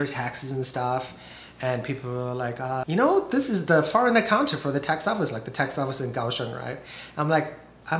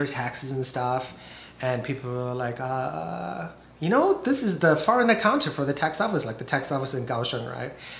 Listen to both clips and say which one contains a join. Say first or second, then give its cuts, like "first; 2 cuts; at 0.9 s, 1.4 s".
first; 1 cut; at 2.8 s